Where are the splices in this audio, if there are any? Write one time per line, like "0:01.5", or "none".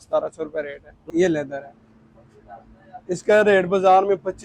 0:01.0